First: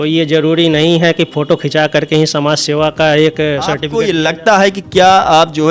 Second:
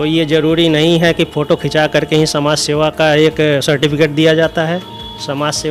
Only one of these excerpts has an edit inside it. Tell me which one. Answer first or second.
first